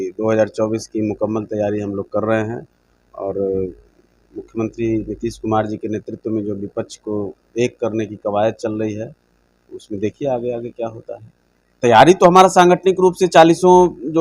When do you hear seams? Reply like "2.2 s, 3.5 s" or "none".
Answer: 11.7 s